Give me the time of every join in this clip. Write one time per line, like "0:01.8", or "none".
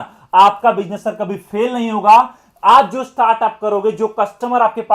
none